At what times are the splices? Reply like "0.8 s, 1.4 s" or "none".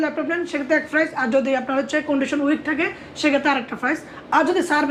none